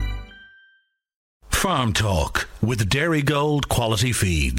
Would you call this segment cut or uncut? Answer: cut